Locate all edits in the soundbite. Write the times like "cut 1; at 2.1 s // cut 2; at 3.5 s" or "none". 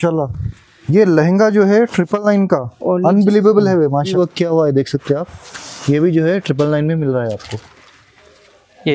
cut 1; at 4.1 s